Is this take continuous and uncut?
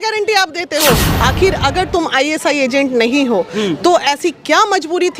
no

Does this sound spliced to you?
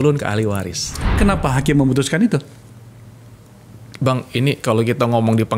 yes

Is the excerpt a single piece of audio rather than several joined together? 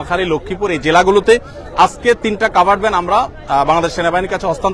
yes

